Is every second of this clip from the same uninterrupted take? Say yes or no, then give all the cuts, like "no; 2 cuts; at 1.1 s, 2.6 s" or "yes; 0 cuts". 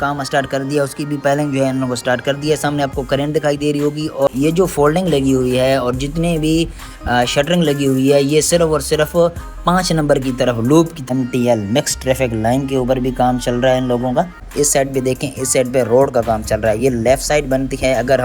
no; 3 cuts; at 4.3 s, 11.0 s, 14.5 s